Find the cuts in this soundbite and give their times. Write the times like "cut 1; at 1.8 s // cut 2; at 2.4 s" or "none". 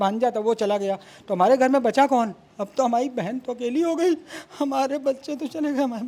none